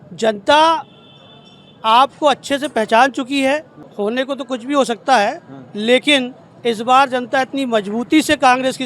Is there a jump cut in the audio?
yes; 1 cut; at 3.8 s

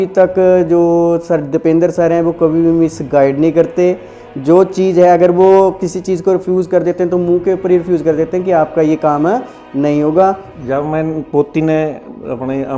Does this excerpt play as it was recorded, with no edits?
yes; 0 cuts

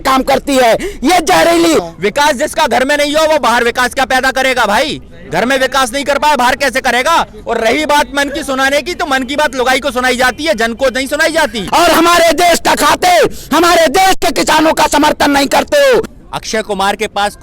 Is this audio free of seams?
no; 3 cuts; at 1.9 s, 11.6 s, 16.1 s

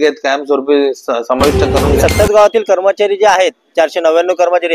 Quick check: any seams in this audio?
yes; 1 cut; at 2.0 s

